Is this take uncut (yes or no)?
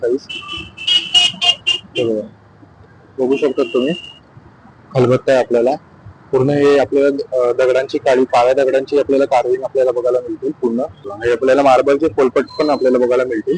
no